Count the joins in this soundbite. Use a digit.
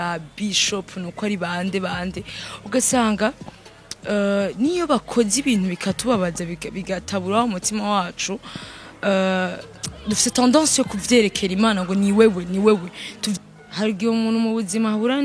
1